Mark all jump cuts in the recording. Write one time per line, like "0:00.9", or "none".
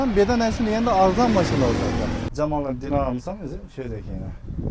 0:02.3